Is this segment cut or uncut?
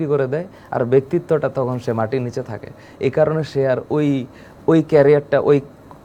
uncut